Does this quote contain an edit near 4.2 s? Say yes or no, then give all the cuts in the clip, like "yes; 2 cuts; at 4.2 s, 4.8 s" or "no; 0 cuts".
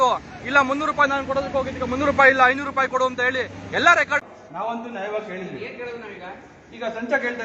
yes; 1 cut; at 4.2 s